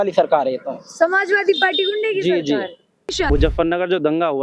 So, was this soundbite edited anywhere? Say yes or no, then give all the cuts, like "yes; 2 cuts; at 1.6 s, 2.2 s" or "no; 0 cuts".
yes; 1 cut; at 3.1 s